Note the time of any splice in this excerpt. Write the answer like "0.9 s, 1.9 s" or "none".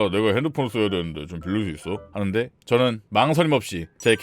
2.5 s

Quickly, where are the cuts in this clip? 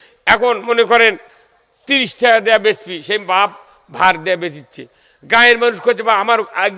none

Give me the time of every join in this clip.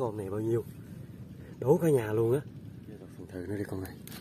3.2 s

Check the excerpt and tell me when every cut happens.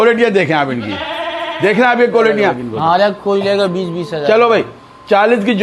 2.6 s

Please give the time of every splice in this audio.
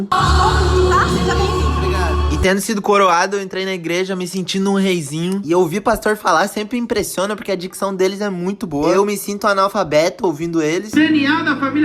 5.4 s

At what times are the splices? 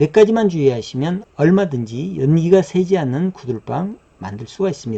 none

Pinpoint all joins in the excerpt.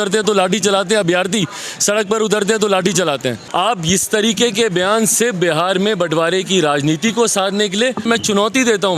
3.4 s, 8.0 s

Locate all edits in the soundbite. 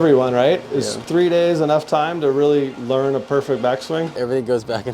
1.0 s, 2.8 s, 4.2 s

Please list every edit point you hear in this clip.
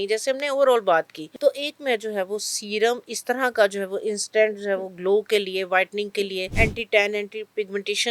1.2 s, 6.5 s

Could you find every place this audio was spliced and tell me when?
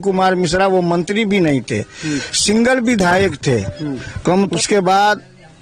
4.5 s

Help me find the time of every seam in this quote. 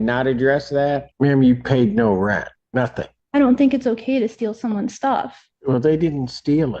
1.1 s, 2.9 s, 5.4 s

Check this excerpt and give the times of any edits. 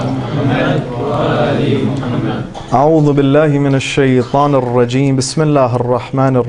3.8 s

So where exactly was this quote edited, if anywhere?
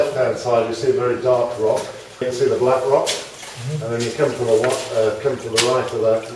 2.2 s

